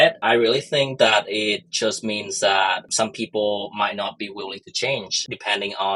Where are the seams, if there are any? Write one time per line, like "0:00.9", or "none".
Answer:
none